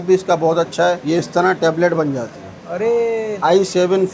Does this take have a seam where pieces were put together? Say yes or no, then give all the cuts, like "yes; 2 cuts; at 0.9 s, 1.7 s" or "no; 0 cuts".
yes; 2 cuts; at 1.0 s, 3.4 s